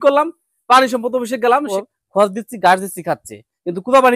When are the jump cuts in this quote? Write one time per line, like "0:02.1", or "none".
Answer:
0:01.7